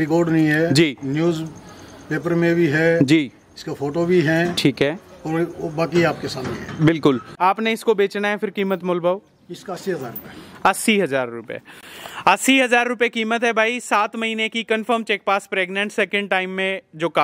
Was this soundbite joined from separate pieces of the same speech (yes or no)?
yes